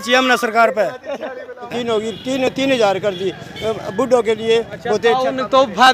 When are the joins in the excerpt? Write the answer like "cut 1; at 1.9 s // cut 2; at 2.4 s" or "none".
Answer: cut 1; at 1.7 s